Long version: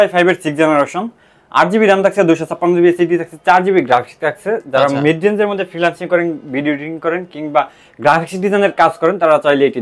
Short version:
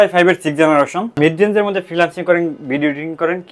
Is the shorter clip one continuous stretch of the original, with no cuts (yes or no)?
no